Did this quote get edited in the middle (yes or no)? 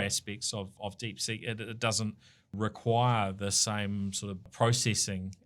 yes